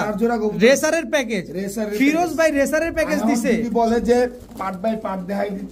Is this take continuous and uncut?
yes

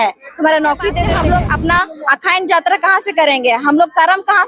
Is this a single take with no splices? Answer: no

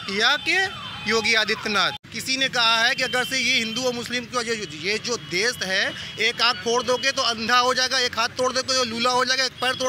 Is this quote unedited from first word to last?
no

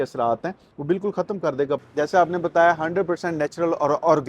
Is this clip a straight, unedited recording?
no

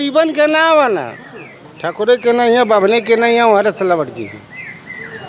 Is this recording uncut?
yes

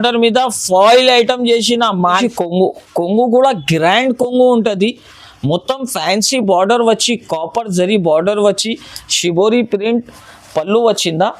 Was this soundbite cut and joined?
yes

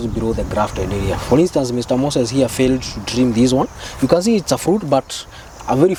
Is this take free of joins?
yes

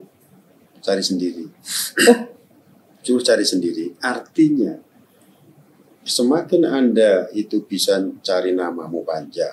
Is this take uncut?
yes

